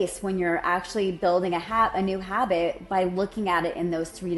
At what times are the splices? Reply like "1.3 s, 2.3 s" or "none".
none